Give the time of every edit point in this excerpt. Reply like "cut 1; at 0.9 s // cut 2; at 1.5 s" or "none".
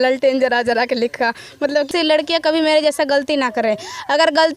cut 1; at 1.9 s